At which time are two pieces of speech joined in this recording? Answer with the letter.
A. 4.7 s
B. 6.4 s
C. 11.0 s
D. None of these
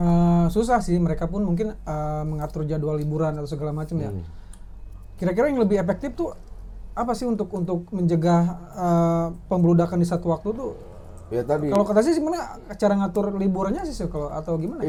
D